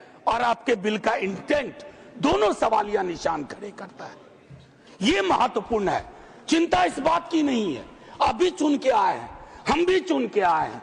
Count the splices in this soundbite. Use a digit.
0